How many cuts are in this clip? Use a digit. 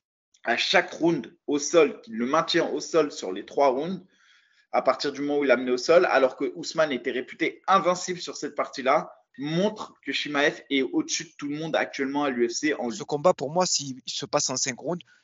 1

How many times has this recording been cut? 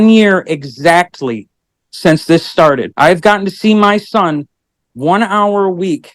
1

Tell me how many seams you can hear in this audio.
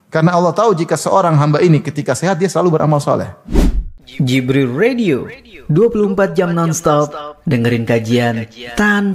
1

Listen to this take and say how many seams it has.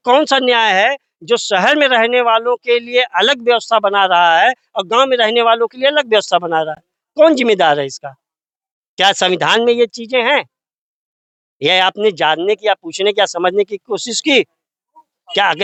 0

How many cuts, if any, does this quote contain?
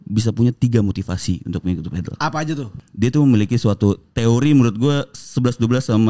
1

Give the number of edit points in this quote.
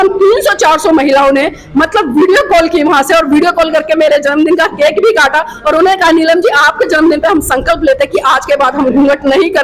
0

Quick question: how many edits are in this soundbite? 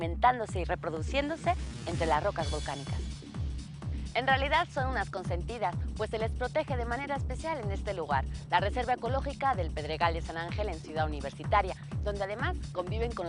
1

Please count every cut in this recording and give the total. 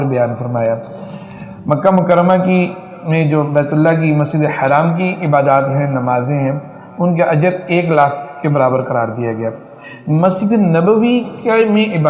0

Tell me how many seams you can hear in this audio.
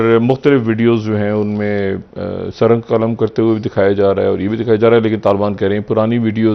0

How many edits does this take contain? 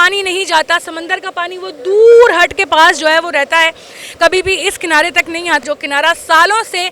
1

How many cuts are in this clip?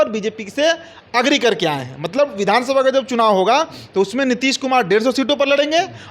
0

